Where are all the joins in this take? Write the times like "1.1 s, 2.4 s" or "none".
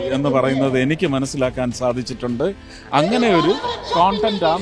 none